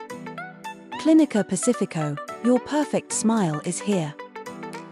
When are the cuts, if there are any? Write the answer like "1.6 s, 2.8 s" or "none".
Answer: 1.0 s, 4.1 s